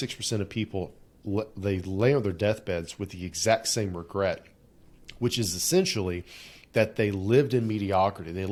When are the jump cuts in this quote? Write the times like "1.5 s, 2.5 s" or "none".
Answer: none